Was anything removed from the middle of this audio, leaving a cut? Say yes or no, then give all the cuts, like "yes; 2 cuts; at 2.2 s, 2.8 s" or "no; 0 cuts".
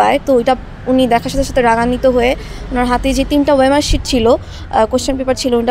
no; 0 cuts